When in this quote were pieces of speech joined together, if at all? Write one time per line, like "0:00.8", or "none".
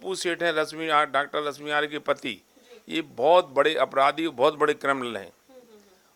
none